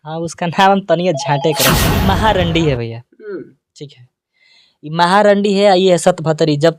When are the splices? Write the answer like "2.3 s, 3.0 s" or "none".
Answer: 1.9 s